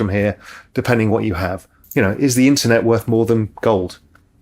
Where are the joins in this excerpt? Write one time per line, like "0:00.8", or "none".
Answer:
0:01.8